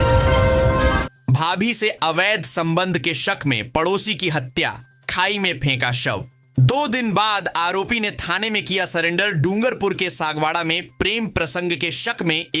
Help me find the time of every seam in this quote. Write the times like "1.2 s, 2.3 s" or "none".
1.2 s